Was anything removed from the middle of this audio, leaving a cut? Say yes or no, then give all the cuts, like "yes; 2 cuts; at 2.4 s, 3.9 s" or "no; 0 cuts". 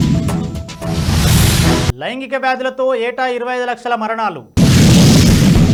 no; 0 cuts